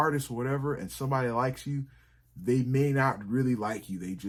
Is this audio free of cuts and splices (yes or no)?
yes